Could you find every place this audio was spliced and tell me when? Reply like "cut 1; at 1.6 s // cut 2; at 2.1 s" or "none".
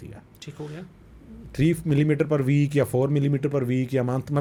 none